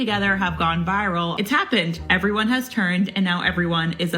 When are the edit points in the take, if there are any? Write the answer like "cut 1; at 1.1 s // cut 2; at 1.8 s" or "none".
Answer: cut 1; at 1.3 s